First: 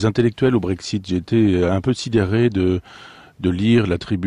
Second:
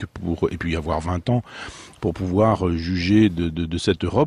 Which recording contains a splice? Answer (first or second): second